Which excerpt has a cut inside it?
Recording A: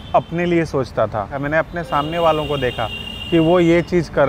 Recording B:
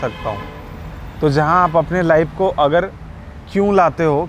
A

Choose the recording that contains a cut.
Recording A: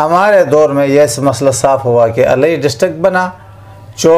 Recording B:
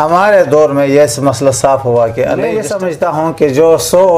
B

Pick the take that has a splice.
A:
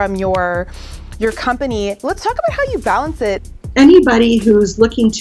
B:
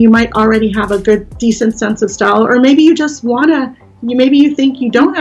A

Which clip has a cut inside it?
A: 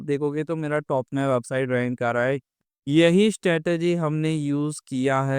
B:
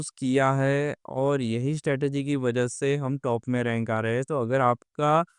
A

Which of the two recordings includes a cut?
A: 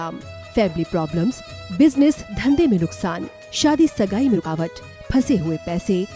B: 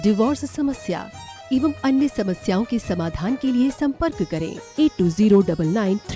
A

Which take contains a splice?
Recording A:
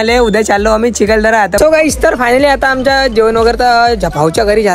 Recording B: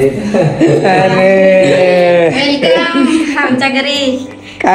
A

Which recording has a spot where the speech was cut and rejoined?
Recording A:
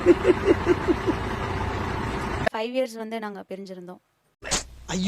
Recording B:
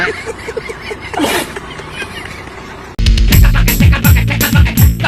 A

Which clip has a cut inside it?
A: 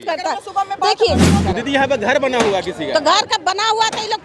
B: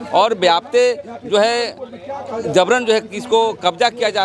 A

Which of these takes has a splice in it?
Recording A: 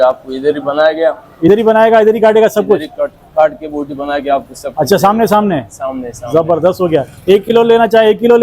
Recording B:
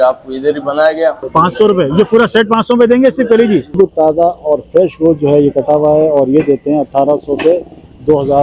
B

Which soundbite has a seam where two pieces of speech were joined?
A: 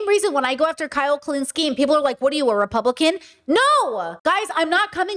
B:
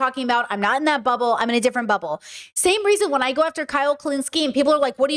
A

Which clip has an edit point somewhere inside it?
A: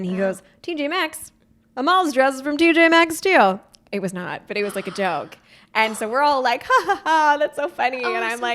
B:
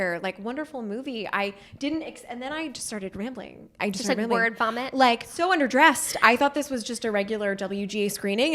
B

